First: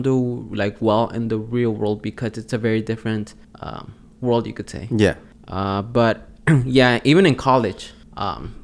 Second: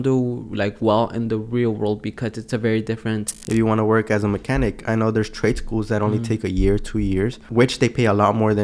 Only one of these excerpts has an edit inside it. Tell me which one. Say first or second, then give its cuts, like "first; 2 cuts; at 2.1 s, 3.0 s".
second; 2 cuts; at 3.3 s, 7.4 s